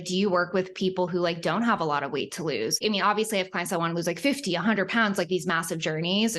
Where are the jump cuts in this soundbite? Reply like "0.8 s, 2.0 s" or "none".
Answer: 2.8 s